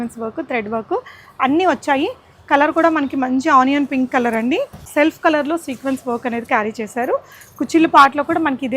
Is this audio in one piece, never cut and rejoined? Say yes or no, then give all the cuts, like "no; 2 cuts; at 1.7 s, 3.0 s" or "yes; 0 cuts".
no; 1 cut; at 4.8 s